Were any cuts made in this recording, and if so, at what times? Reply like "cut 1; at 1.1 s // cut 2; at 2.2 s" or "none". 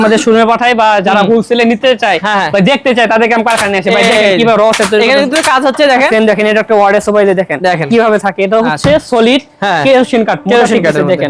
cut 1; at 6.1 s